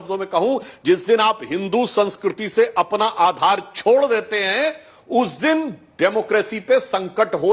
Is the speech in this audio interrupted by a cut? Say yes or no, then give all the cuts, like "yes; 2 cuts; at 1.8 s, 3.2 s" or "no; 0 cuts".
no; 0 cuts